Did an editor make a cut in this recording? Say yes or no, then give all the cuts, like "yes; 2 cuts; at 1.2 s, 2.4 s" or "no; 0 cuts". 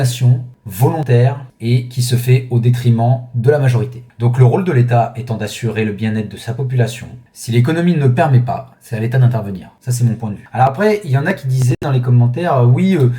yes; 1 cut; at 10.4 s